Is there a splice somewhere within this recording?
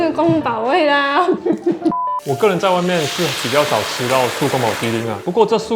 yes; 1 cut; at 2.1 s

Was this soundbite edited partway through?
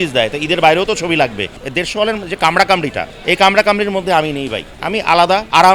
yes; 2 cuts; at 1.6 s, 3.1 s

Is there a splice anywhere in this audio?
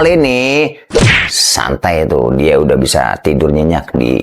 no; 0 cuts

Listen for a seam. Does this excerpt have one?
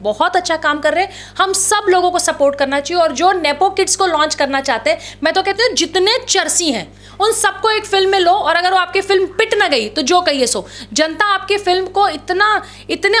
no; 0 cuts

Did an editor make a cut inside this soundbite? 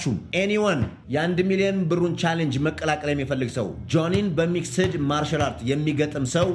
no; 0 cuts

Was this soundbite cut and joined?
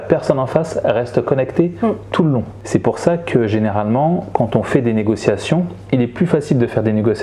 no; 0 cuts

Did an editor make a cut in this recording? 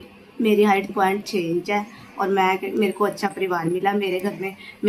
yes; 1 cut; at 0.9 s

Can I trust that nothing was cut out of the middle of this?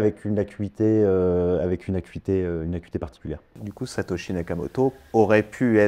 no; 1 cut; at 3.5 s

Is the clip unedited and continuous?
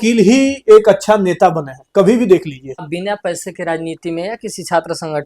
no; 1 cut; at 2.9 s

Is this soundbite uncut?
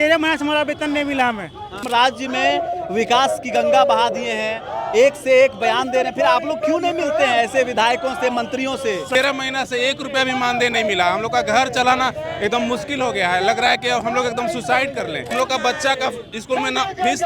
no; 3 cuts; at 1.8 s, 9.1 s, 15.3 s

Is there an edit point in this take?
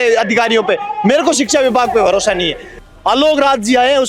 yes; 1 cut; at 2.6 s

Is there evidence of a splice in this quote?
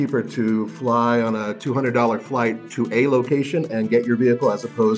no; 0 cuts

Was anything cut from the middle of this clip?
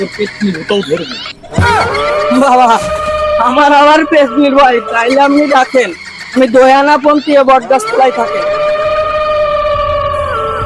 no; 0 cuts

